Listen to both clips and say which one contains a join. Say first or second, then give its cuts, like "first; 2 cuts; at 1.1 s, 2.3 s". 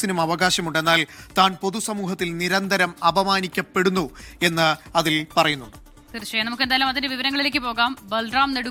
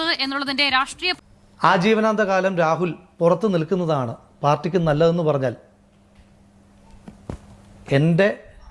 second; 1 cut; at 1.0 s